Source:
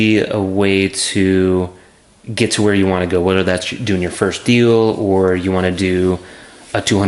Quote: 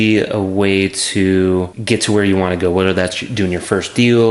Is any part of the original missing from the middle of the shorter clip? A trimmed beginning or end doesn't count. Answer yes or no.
yes